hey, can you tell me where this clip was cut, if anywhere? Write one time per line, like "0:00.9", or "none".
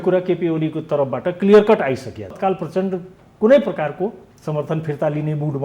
0:02.4